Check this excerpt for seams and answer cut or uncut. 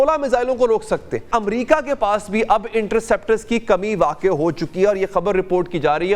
cut